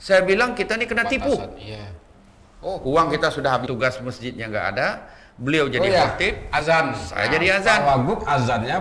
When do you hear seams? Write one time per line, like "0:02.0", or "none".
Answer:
0:03.7